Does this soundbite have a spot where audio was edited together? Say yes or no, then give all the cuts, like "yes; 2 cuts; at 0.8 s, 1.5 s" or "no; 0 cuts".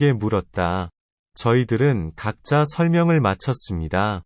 no; 0 cuts